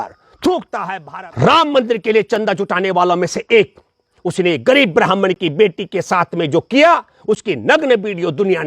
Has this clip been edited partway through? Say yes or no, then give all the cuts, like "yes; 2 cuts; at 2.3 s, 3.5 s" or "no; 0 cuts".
yes; 1 cut; at 1.0 s